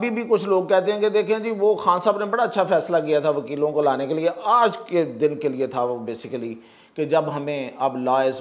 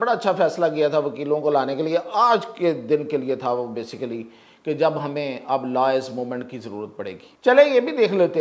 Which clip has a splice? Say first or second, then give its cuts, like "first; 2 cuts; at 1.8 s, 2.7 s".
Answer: second; 1 cut; at 7.3 s